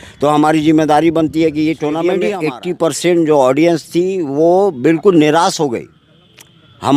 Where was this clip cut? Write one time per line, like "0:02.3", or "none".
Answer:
0:02.3